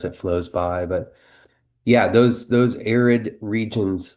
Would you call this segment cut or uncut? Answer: cut